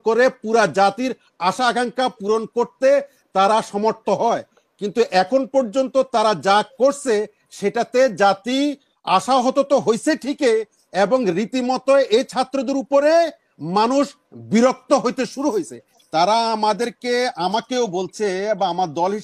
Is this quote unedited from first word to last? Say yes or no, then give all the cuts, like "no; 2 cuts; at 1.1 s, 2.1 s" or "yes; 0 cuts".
no; 1 cut; at 15.8 s